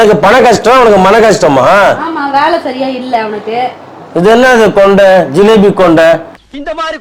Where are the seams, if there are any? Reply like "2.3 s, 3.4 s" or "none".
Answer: none